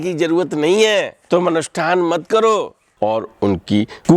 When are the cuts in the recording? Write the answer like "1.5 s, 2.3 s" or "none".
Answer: 1.2 s, 2.8 s